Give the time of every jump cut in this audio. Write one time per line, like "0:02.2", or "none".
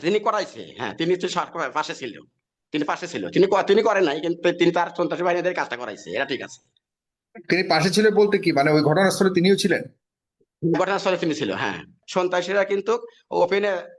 0:12.0